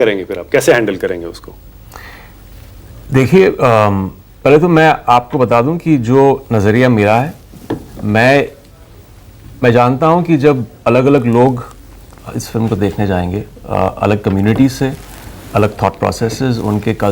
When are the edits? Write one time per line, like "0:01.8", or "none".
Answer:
none